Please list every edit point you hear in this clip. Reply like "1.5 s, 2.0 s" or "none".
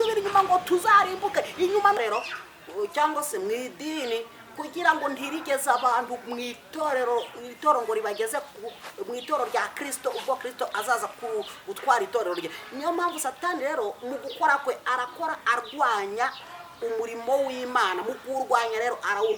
2.0 s